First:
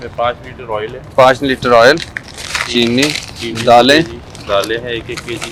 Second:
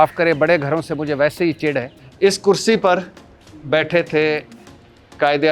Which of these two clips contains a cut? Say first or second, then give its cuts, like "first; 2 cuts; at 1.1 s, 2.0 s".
second; 1 cut; at 2.0 s